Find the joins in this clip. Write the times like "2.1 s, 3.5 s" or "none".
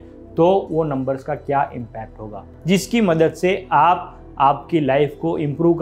2.5 s